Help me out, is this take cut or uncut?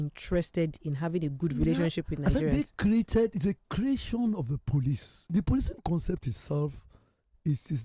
cut